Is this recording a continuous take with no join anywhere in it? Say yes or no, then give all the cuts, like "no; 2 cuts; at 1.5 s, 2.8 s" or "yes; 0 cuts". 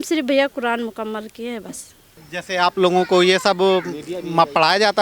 no; 1 cut; at 2.1 s